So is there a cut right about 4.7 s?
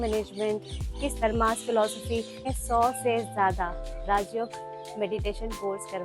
no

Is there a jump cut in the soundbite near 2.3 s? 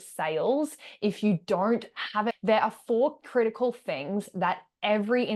yes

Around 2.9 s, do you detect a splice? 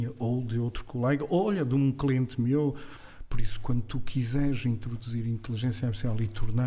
yes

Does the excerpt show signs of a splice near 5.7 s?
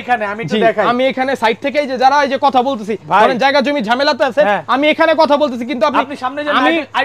no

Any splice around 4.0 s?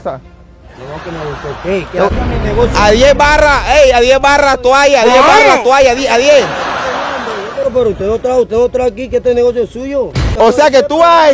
no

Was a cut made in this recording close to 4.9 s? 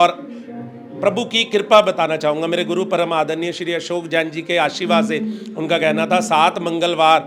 no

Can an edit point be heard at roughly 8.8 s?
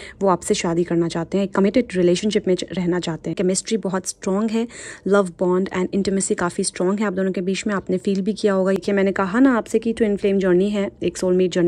yes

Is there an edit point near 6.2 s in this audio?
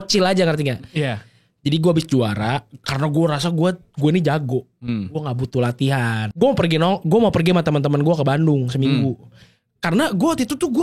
yes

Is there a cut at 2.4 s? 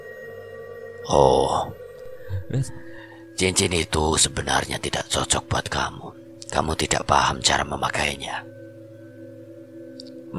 yes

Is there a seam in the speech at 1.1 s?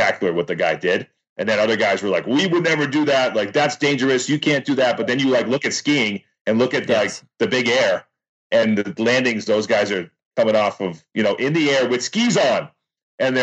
no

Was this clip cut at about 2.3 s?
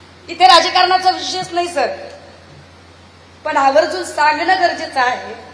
no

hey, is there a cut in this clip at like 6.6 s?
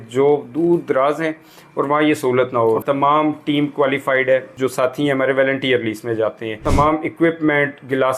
yes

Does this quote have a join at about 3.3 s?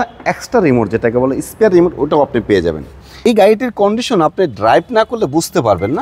yes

